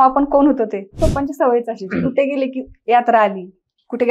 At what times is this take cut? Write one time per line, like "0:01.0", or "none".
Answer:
0:01.0